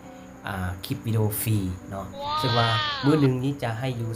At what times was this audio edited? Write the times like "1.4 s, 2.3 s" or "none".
2.2 s